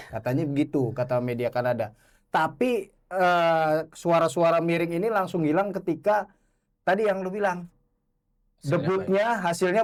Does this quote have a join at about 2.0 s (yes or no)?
no